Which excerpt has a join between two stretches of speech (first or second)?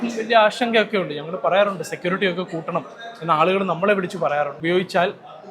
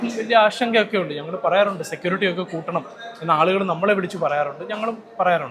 first